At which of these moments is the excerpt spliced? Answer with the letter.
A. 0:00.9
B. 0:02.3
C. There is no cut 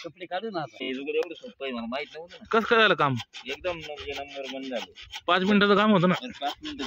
A